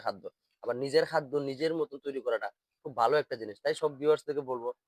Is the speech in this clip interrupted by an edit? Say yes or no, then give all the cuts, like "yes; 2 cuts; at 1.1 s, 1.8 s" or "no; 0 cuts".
no; 0 cuts